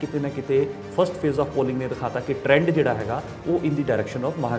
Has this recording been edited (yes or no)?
no